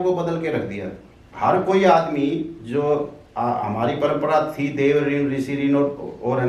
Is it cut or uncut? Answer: uncut